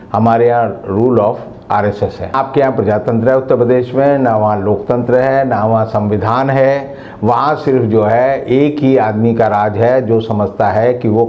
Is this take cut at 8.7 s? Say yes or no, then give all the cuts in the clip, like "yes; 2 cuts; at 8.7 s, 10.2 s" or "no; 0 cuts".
no; 1 cut; at 2.3 s